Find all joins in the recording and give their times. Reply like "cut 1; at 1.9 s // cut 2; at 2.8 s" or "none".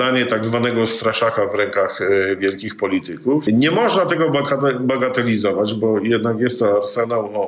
cut 1; at 3.4 s